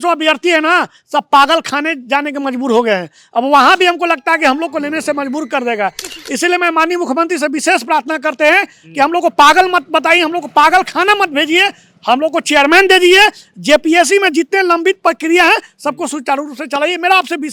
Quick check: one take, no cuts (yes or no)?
yes